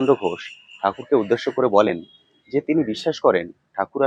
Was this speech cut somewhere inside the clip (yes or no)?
no